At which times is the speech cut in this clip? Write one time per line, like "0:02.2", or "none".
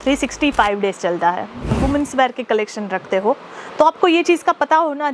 0:01.7